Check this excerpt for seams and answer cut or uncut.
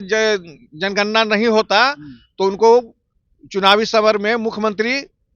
uncut